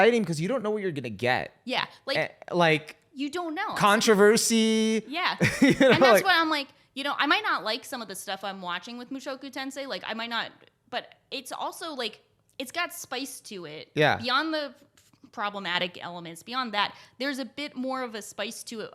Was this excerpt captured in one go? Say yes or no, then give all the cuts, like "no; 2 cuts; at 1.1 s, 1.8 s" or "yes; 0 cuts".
yes; 0 cuts